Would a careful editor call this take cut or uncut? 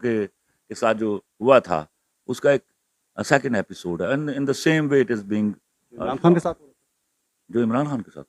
uncut